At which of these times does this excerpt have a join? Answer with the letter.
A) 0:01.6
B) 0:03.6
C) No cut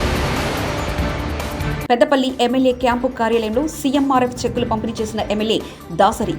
A